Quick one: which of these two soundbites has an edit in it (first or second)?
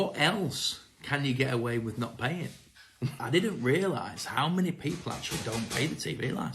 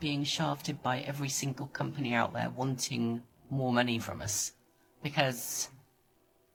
first